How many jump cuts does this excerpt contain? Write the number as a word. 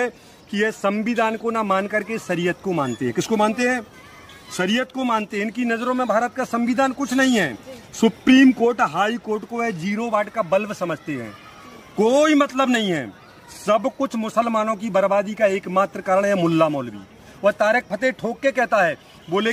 zero